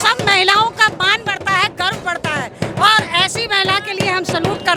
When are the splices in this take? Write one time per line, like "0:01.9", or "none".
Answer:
none